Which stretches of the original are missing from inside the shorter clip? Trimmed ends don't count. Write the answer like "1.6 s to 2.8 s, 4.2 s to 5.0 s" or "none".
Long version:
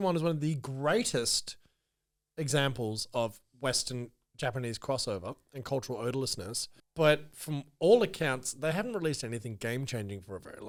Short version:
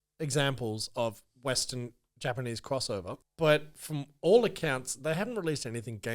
5.4 s to 6.8 s